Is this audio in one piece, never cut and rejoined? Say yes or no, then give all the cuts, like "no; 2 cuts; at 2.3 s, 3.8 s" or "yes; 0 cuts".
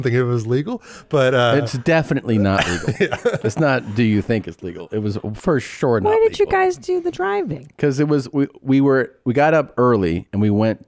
yes; 0 cuts